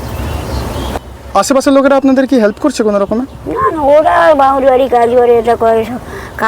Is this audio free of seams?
no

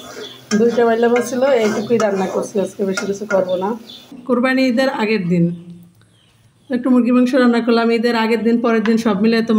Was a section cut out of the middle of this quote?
yes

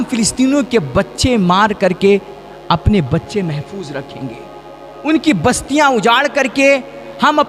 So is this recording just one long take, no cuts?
yes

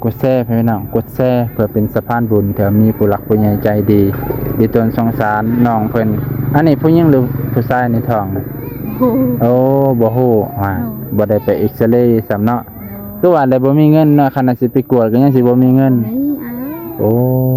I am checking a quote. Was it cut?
no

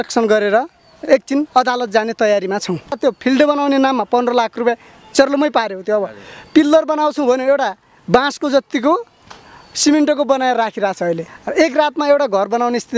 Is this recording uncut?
no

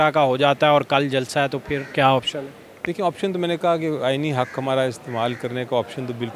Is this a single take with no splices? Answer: yes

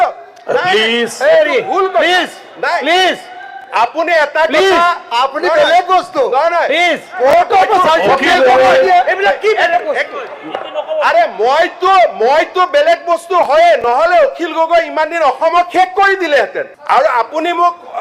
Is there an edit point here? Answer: yes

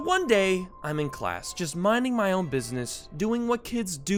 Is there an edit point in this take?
no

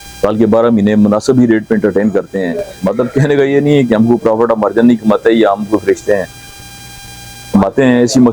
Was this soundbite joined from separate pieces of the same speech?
no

